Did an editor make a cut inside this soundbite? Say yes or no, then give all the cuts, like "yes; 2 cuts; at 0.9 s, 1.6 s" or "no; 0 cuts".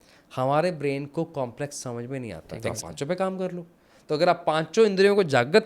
yes; 1 cut; at 2.5 s